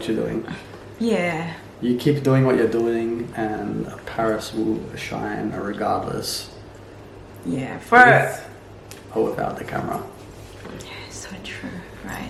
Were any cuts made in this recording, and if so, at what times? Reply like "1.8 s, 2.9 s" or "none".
none